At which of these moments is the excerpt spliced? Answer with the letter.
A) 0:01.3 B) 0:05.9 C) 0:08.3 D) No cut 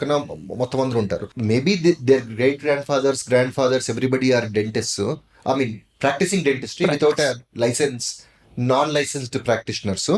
A